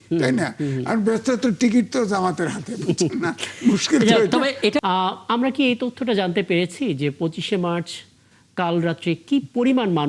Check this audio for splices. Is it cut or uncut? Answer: cut